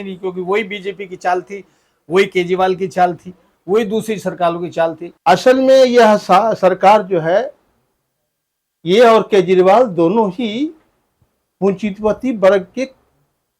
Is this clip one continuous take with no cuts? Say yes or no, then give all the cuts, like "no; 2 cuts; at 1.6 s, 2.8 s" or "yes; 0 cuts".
no; 1 cut; at 5.1 s